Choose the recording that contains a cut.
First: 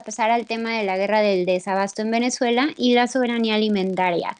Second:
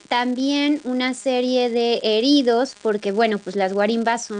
second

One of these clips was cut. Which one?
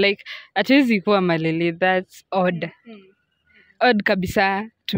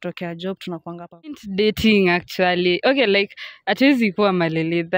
second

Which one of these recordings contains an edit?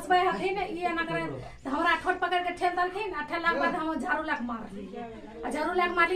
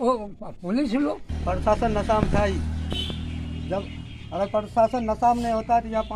second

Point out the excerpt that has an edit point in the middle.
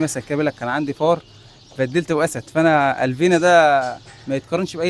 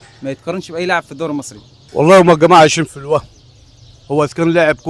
second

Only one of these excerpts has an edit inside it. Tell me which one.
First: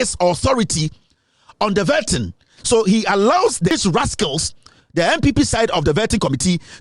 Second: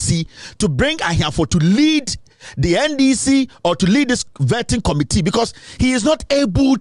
first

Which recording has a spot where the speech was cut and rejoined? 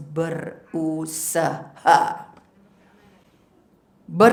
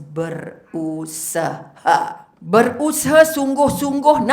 second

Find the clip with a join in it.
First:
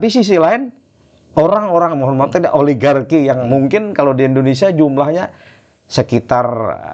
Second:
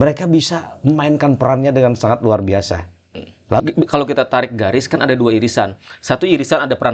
second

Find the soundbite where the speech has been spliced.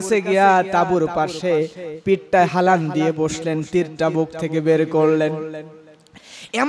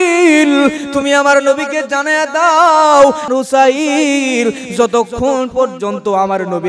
second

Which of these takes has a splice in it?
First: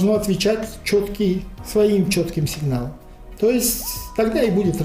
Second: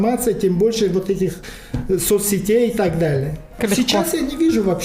second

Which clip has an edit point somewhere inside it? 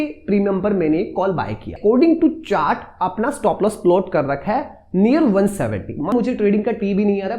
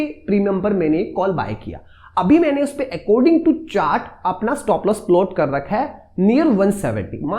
first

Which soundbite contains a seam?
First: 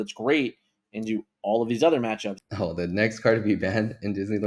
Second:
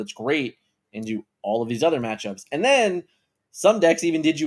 first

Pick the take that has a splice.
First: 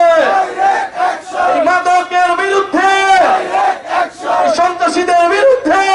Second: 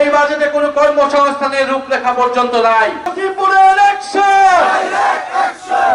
second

